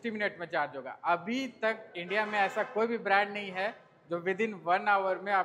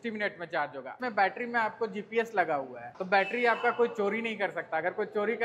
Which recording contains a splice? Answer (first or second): second